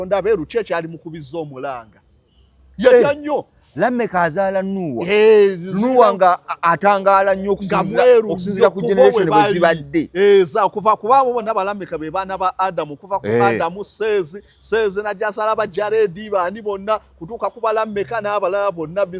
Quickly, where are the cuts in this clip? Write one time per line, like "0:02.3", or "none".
none